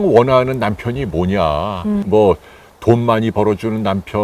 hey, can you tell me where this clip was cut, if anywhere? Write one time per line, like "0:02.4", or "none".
0:02.1